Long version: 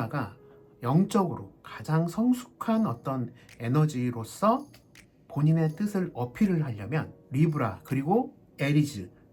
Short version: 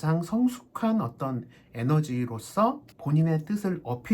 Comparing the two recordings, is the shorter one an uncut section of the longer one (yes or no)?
no